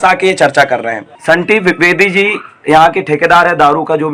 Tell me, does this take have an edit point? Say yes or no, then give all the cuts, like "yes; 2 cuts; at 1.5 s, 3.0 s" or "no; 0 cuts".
yes; 1 cut; at 1.1 s